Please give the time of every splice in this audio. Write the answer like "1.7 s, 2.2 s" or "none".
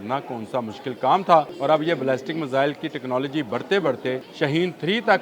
1.5 s, 4.3 s